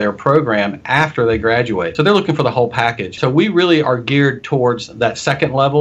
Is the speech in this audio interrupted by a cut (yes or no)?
yes